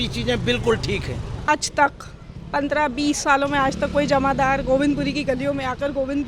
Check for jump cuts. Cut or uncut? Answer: cut